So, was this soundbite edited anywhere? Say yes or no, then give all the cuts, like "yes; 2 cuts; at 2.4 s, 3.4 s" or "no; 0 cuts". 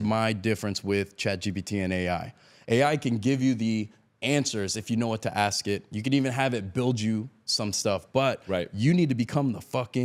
no; 0 cuts